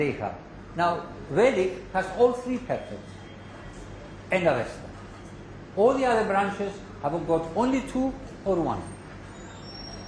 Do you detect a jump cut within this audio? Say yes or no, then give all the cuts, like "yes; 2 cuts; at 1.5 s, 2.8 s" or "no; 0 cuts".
yes; 1 cut; at 6.7 s